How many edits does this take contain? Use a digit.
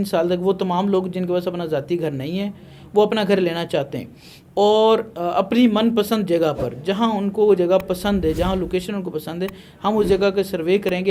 0